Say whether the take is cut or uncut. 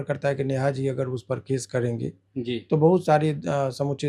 uncut